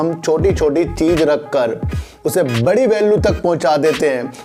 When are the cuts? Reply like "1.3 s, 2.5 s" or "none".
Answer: none